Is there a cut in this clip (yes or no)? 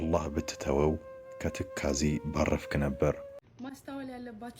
yes